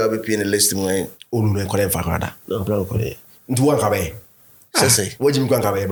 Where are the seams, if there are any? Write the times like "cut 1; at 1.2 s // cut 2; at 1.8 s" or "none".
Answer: none